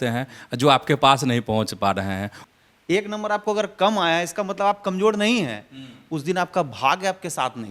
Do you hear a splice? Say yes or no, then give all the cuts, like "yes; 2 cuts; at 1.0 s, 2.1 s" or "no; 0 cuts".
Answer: yes; 1 cut; at 2.3 s